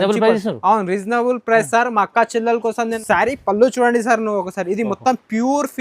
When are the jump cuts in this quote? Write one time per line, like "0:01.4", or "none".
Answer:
0:03.0